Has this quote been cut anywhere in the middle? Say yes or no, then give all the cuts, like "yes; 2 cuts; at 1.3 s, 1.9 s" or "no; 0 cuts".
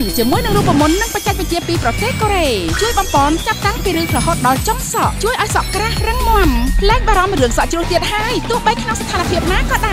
no; 0 cuts